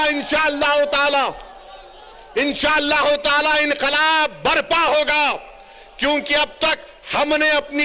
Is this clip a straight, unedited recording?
yes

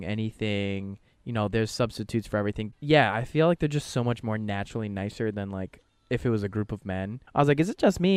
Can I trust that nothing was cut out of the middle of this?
no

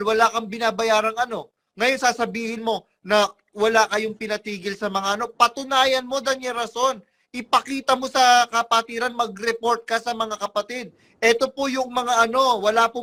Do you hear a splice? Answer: no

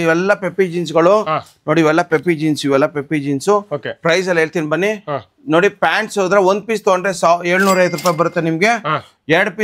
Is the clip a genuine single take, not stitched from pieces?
yes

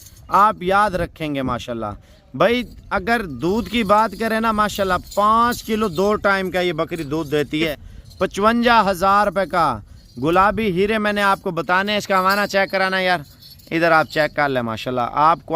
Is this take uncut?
no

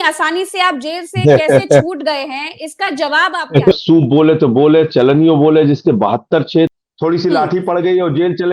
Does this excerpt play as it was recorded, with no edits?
no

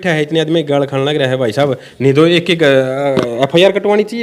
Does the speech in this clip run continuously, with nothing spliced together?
yes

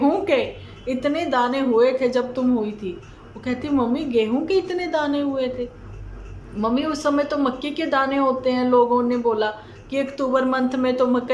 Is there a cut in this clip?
no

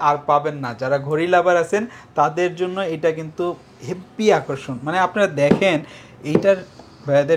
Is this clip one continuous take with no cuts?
yes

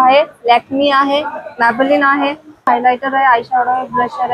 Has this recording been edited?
yes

